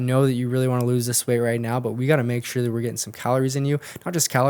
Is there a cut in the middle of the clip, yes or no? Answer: no